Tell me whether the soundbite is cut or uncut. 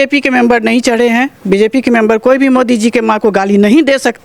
uncut